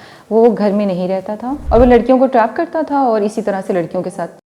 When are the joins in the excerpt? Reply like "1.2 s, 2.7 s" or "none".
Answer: 1.5 s